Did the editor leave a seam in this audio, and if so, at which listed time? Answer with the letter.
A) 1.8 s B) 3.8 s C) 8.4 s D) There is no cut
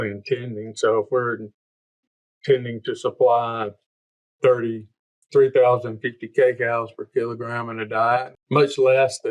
C